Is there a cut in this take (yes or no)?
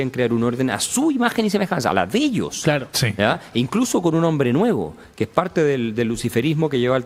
no